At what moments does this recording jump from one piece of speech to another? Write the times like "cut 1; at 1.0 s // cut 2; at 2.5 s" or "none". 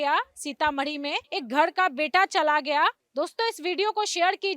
cut 1; at 1.2 s // cut 2; at 3.0 s